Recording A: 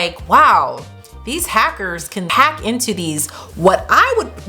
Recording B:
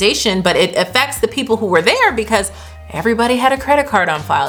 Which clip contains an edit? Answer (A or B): A